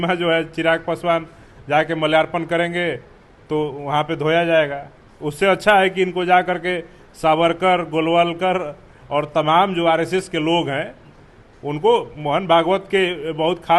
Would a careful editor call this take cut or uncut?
uncut